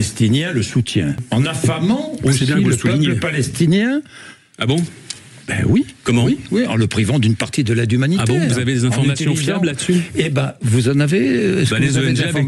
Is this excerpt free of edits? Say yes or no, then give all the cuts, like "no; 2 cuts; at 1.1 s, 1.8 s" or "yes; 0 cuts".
no; 1 cut; at 1.2 s